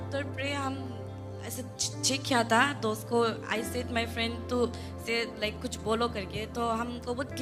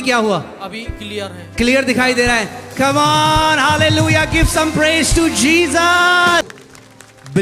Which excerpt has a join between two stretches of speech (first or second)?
second